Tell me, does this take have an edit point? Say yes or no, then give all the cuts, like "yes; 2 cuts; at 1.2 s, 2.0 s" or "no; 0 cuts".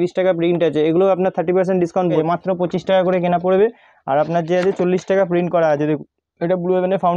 yes; 1 cut; at 2.2 s